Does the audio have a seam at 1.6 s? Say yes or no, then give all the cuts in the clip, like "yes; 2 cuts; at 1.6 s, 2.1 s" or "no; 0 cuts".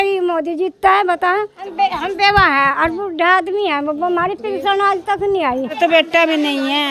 yes; 2 cuts; at 1.6 s, 5.8 s